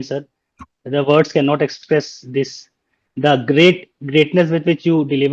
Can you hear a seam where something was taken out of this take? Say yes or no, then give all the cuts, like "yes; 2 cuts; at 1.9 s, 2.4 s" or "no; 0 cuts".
yes; 1 cut; at 1.8 s